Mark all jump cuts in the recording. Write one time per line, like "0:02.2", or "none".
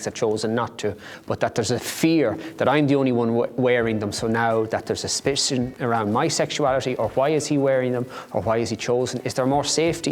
none